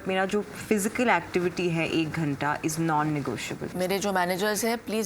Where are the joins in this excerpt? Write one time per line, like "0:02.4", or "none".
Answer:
0:03.7

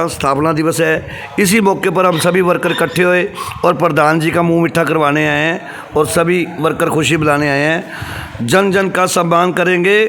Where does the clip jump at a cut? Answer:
none

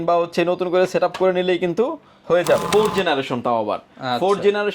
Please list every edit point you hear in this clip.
0:02.7

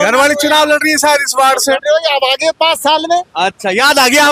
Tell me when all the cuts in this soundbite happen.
none

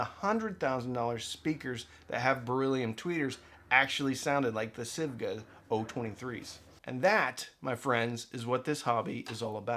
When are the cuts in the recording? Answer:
0:06.7

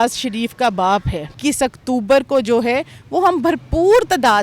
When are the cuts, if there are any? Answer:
0:01.3

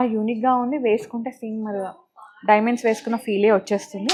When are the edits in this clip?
none

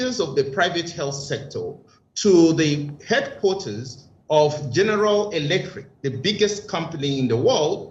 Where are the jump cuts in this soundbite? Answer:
none

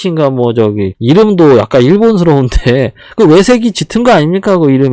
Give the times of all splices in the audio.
none

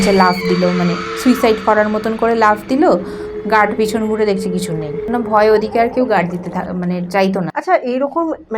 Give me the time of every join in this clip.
0:05.1
0:07.5

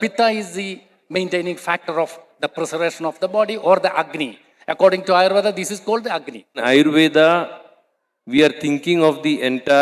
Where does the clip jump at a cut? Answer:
0:06.6

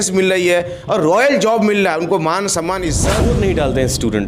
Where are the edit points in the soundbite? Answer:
0:03.1

